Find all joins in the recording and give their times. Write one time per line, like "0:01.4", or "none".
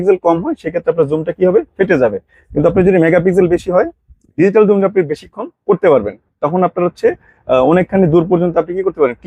none